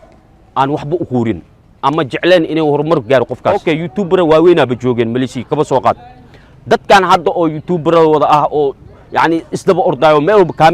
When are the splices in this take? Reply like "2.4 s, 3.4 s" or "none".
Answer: 3.6 s